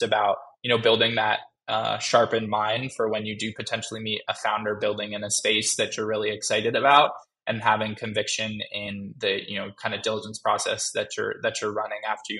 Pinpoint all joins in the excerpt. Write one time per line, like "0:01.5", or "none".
none